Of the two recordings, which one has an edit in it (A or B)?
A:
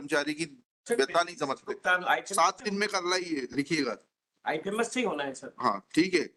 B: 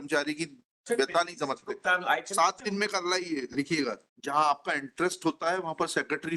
B